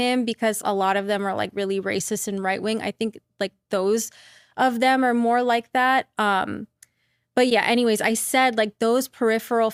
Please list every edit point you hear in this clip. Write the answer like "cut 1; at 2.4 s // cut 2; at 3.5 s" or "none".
none